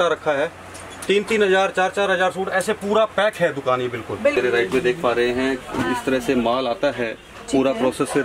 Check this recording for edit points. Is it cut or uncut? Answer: cut